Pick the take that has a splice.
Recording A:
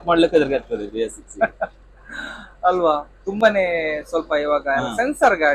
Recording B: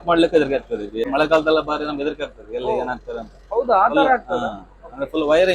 B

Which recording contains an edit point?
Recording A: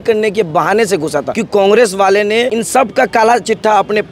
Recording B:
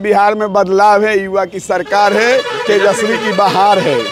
A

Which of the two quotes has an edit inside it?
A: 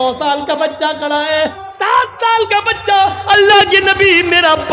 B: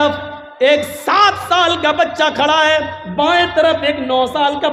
A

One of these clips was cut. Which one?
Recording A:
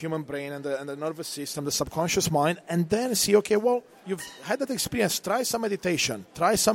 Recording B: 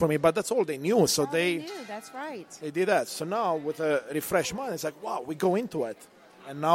A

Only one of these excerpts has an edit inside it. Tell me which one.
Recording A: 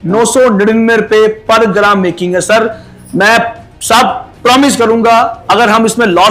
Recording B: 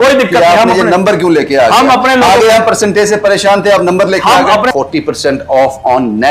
B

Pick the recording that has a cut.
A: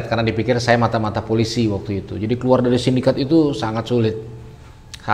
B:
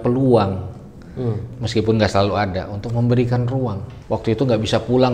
B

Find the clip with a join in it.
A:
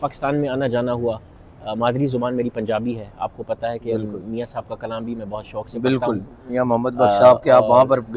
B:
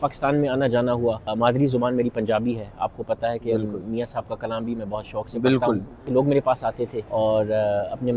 B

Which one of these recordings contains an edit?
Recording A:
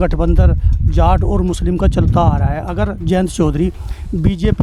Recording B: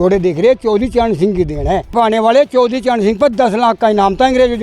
B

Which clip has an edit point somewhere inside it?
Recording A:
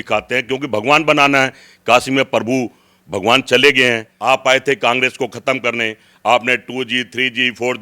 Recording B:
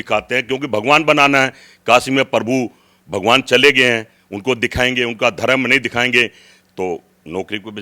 A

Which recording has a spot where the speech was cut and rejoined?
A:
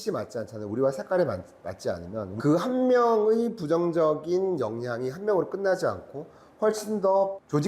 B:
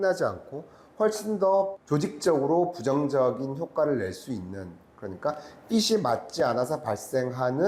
A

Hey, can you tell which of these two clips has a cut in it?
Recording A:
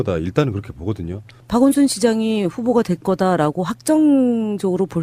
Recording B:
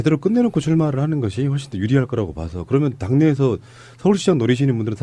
B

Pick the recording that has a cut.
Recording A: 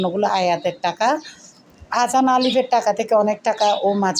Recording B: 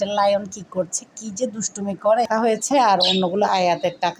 B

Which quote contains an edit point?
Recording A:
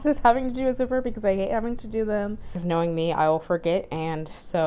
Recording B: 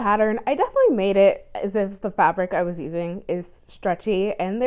A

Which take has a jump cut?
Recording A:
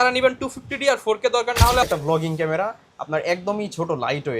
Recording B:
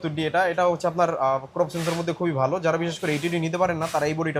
A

